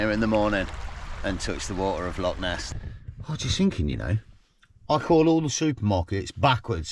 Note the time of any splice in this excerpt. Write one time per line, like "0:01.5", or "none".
0:02.8